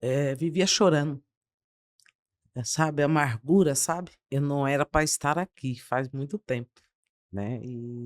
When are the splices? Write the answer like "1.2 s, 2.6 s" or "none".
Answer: 4.2 s